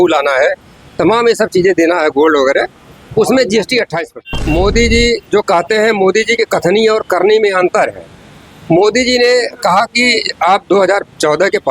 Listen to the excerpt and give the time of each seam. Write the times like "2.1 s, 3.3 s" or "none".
4.0 s